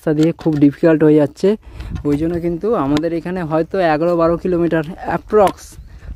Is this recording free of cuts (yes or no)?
yes